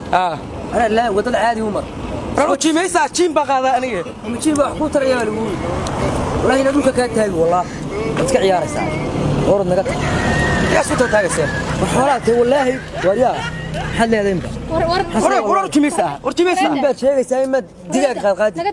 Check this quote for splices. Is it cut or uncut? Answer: uncut